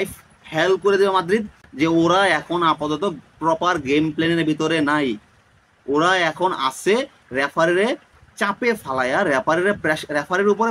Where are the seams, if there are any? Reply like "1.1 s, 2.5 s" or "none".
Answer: 1.6 s